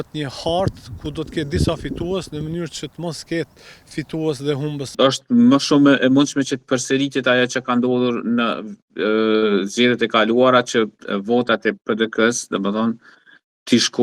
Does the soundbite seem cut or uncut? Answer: cut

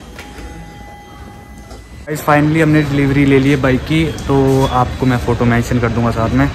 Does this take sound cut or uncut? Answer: cut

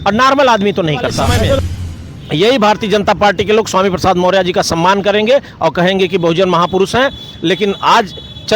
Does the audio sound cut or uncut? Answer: cut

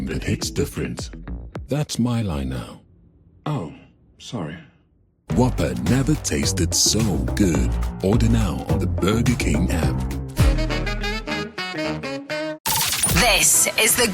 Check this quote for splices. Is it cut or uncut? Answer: cut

